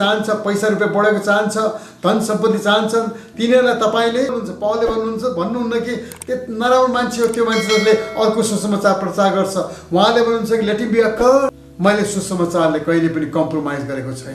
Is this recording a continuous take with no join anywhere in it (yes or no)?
no